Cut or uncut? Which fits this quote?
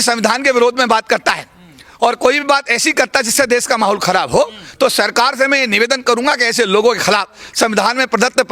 uncut